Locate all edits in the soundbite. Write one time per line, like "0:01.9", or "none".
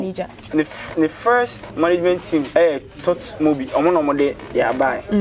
0:02.5